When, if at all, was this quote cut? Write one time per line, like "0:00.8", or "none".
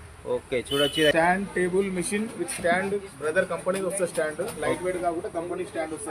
0:01.1

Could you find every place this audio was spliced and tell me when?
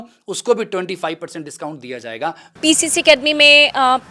0:02.5

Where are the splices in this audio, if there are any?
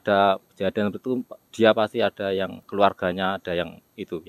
0:02.6

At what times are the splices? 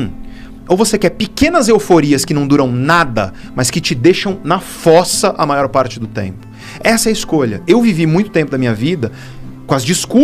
none

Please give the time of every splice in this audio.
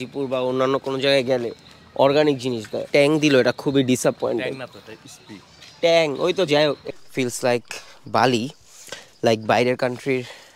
0:02.8
0:06.9

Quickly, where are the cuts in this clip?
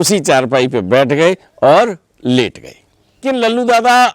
0:03.2

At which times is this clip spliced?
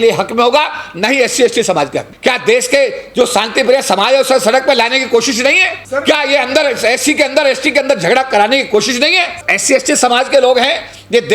0:02.0
0:05.7
0:09.4

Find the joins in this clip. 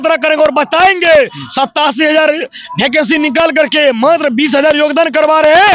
none

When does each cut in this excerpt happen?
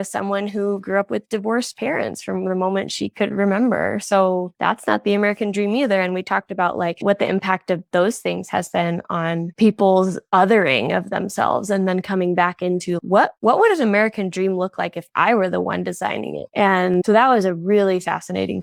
none

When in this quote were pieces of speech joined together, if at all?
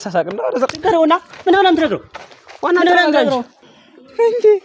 0:03.5

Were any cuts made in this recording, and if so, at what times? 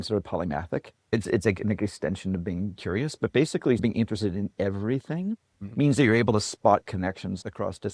0:01.1
0:03.8

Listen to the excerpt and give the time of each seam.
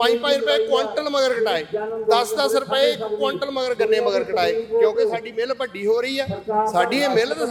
none

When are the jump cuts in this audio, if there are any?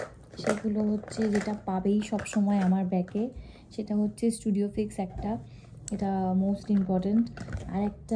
none

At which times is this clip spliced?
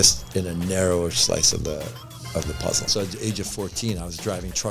0:02.9

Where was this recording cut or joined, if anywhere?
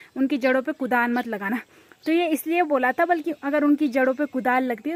none

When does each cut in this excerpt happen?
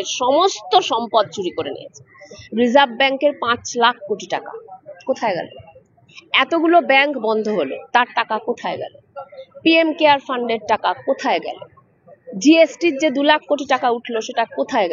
none

